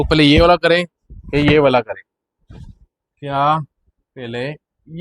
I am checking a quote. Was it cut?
no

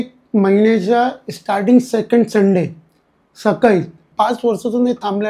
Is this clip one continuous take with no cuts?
no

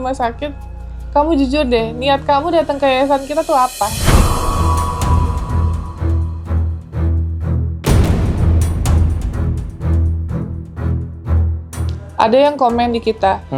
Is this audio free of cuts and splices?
no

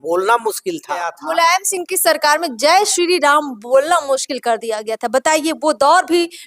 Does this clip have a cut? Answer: yes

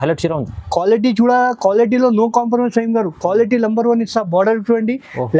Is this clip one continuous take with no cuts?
yes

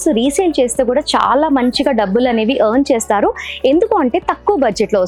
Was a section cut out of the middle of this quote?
no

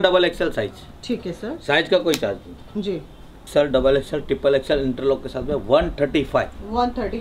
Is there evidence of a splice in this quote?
yes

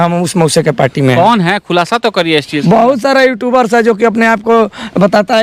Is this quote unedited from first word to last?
yes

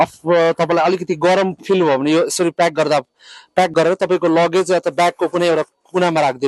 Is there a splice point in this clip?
no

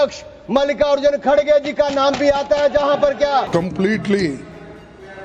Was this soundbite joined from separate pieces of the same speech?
yes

